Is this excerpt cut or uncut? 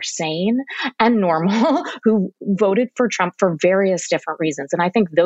uncut